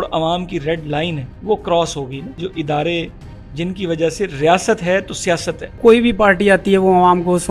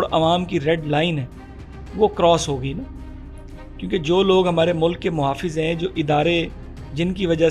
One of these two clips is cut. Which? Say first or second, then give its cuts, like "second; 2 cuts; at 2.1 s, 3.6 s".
first; 3 cuts; at 1.3 s, 2.4 s, 5.8 s